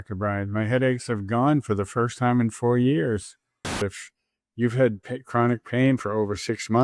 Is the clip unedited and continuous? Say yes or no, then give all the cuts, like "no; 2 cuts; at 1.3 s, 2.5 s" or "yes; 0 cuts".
no; 1 cut; at 3.8 s